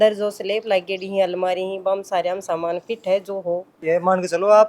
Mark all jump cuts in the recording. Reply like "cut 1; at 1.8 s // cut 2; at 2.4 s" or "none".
cut 1; at 3.7 s